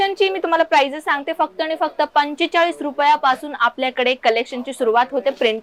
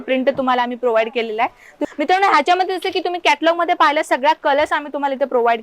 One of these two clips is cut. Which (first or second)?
second